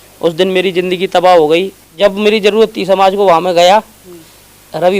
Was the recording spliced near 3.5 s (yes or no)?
no